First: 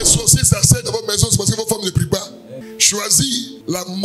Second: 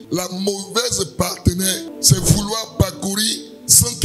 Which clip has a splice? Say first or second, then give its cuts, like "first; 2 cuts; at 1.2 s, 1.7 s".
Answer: first; 1 cut; at 2.6 s